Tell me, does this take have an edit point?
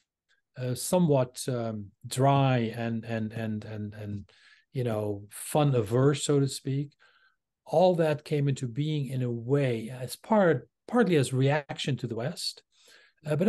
yes; 1 cut; at 11.7 s

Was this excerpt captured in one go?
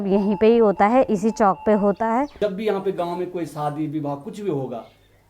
no; 1 cut; at 2.4 s

